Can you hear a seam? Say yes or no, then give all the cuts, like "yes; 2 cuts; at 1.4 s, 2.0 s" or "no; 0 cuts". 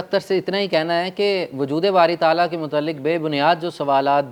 no; 0 cuts